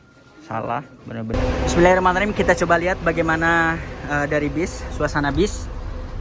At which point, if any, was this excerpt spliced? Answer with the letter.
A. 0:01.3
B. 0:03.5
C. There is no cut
A